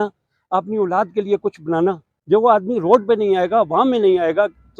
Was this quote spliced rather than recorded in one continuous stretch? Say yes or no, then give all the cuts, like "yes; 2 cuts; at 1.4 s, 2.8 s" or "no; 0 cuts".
yes; 1 cut; at 2.1 s